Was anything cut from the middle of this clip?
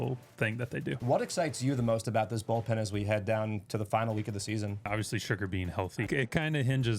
yes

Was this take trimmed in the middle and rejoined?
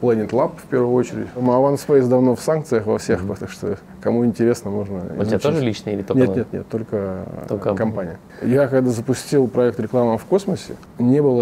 yes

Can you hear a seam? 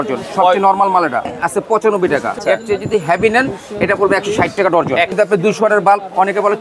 yes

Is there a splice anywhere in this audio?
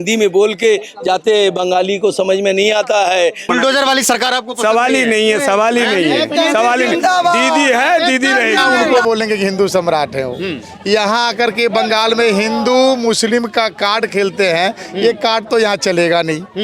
yes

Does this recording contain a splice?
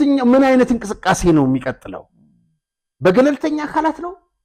no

